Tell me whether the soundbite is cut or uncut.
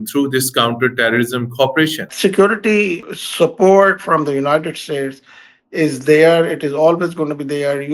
cut